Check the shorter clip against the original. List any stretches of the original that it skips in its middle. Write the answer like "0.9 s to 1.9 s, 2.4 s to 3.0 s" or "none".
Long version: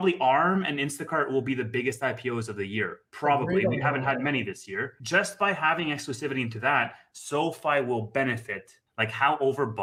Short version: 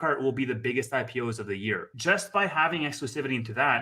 3.0 s to 5.0 s